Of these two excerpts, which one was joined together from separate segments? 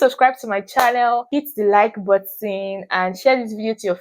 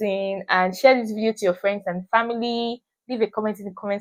first; 1 cut; at 1.3 s

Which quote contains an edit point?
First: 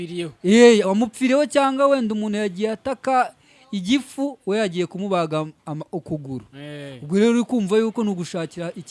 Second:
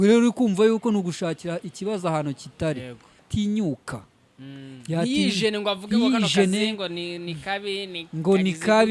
second; 1 cut; at 3.2 s

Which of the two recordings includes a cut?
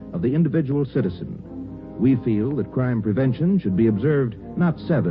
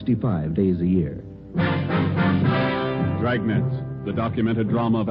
second; 1 cut; at 1.8 s

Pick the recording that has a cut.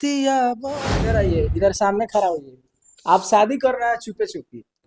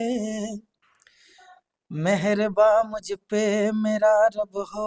first; 1 cut; at 1.0 s

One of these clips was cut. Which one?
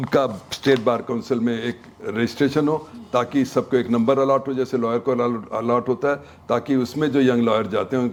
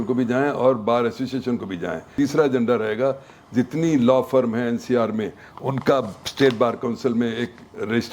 second; 1 cut; at 2.1 s

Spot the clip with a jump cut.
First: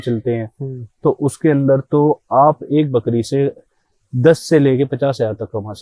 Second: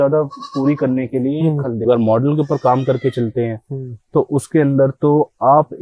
second; 1 cut; at 1.8 s

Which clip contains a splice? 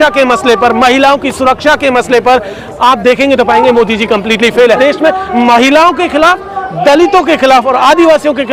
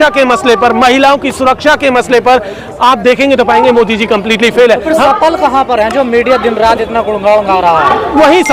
first; 1 cut; at 4.8 s

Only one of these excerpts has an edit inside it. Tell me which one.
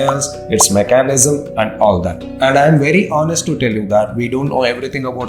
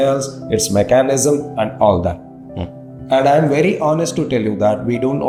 first; 1 cut; at 2.2 s

